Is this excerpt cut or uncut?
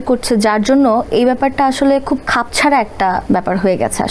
cut